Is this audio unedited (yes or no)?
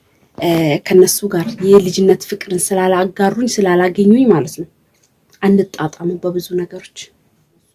yes